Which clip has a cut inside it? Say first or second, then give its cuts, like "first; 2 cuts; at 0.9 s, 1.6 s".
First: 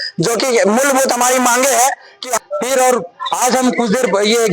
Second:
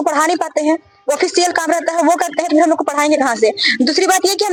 first; 1 cut; at 2.3 s